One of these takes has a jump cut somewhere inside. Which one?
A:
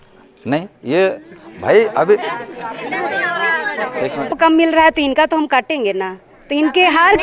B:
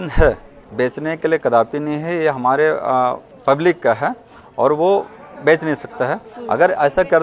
A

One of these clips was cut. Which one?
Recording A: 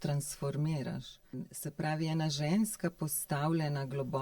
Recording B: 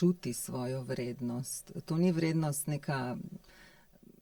A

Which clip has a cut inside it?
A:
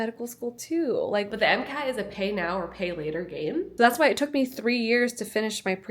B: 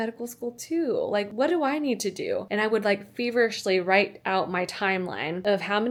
A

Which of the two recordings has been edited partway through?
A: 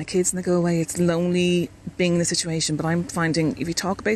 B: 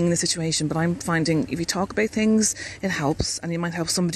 A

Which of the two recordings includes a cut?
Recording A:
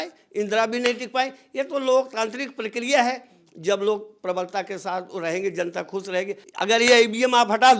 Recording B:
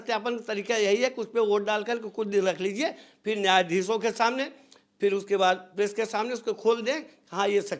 A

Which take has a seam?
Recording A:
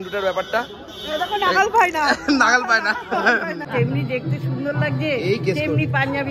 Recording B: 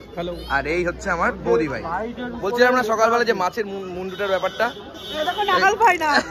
A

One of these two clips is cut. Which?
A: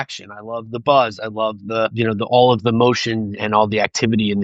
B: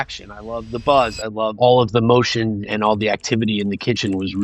B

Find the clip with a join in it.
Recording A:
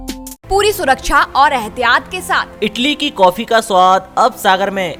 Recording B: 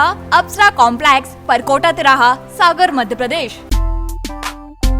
B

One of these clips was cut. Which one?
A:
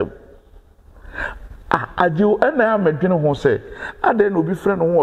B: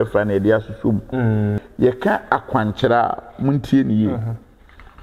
B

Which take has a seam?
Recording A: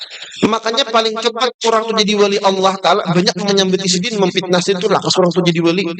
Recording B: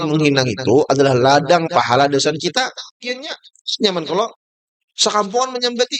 B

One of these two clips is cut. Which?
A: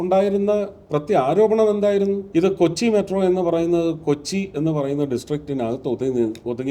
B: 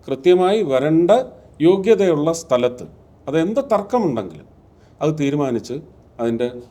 A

